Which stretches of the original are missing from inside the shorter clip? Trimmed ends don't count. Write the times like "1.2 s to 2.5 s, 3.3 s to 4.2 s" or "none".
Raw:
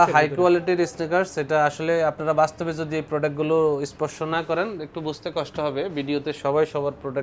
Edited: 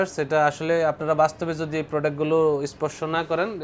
none